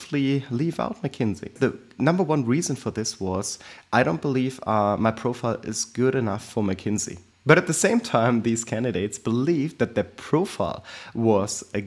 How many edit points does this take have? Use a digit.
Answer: 2